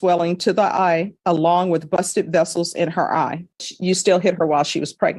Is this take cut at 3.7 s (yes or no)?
yes